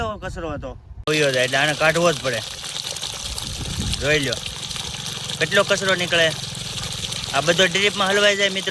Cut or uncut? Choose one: cut